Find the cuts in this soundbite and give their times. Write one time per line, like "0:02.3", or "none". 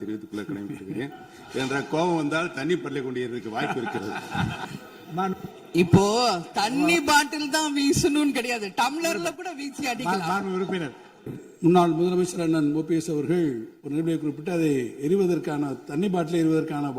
0:04.6
0:11.3